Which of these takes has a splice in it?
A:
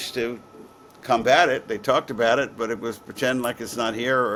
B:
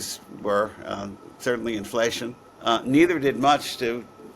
B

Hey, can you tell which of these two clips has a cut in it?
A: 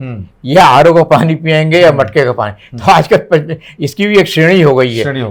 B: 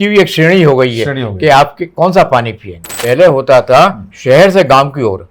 B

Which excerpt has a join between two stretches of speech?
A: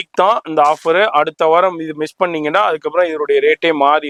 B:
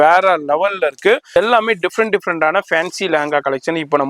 B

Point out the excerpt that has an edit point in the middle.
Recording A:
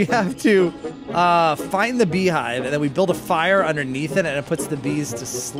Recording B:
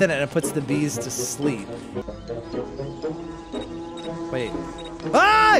B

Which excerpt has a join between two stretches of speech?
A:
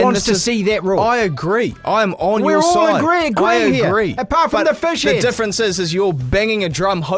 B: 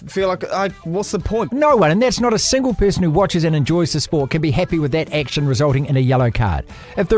B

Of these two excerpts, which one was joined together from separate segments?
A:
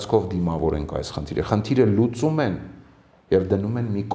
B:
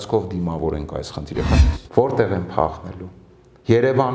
B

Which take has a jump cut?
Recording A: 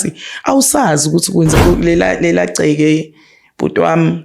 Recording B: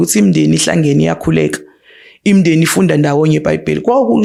A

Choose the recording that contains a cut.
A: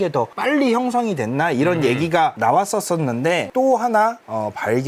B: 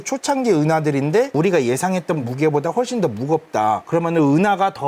A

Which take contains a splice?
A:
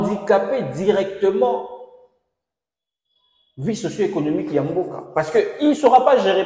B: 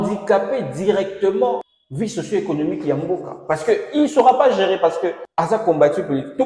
B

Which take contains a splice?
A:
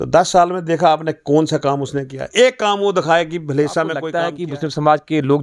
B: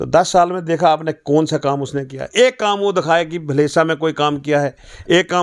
A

